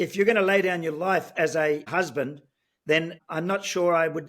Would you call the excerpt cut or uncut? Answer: cut